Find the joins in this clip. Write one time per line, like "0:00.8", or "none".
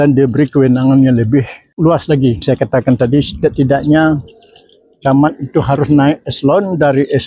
0:01.6
0:02.4